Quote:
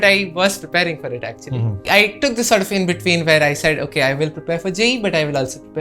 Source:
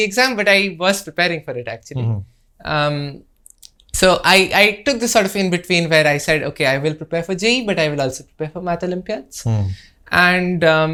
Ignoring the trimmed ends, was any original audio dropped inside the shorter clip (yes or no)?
yes